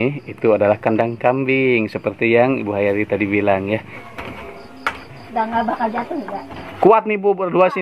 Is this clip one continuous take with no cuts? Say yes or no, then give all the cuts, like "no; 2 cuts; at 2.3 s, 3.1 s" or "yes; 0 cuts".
no; 1 cut; at 3.9 s